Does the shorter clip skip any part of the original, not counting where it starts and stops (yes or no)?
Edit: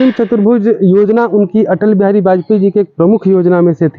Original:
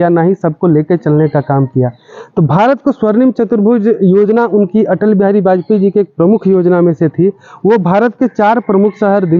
no